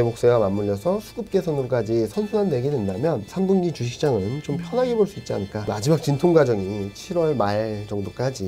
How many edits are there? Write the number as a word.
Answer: one